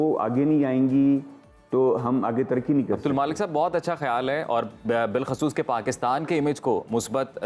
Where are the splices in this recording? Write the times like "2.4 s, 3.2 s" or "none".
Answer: none